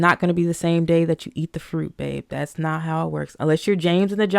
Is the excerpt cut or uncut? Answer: uncut